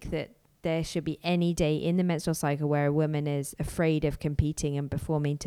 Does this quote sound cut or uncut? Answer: uncut